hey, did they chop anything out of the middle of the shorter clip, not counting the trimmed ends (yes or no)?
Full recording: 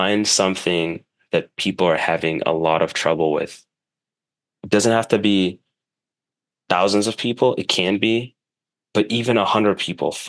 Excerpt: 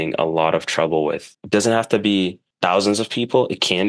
yes